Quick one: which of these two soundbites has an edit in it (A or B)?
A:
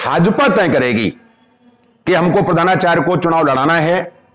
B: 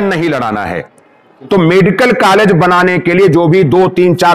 B